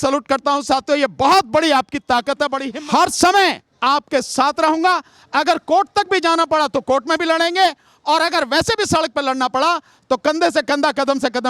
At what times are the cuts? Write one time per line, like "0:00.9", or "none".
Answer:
0:02.7